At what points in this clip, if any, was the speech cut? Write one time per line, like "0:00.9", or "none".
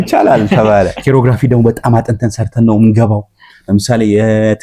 0:01.0